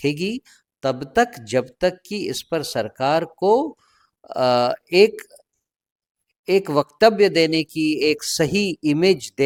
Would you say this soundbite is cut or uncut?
uncut